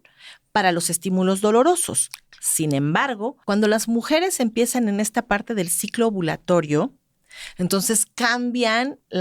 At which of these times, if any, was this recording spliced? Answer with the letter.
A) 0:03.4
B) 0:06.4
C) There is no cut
A